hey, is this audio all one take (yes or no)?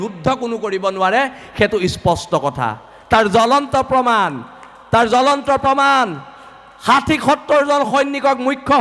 yes